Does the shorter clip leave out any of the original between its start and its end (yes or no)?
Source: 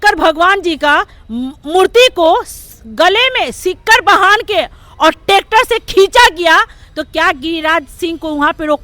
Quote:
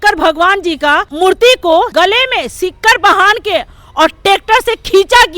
yes